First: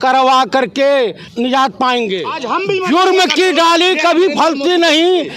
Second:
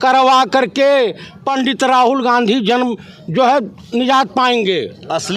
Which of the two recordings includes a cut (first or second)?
first